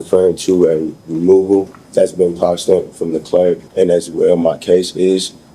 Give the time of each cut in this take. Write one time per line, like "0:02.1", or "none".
0:01.8
0:03.7